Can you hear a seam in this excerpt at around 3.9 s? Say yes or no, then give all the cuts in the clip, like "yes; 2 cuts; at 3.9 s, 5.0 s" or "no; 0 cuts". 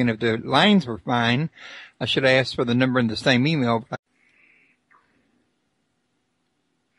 no; 0 cuts